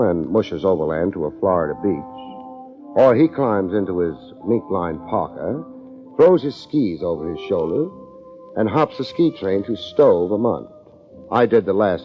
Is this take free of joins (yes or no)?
no